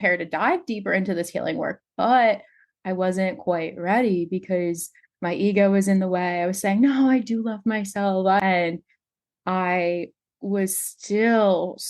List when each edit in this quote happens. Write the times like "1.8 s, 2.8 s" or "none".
8.4 s